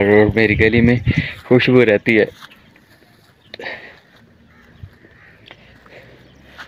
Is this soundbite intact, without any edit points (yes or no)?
yes